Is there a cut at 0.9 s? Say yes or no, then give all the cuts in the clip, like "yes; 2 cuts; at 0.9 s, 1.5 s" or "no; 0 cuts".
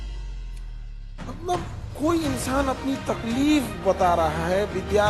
yes; 1 cut; at 0.9 s